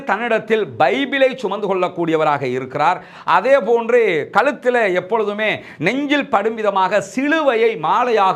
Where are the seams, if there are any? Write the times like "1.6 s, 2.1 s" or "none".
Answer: none